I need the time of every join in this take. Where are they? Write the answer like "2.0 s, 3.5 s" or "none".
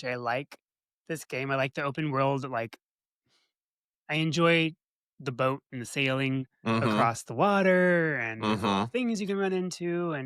none